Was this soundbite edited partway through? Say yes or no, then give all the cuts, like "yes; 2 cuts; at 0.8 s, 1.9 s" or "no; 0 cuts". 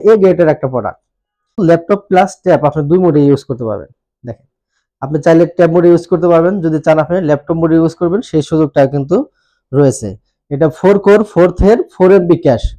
yes; 1 cut; at 1.6 s